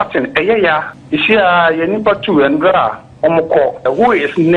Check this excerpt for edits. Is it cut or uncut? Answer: cut